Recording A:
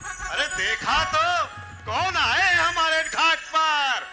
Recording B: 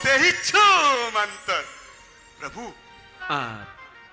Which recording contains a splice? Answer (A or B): B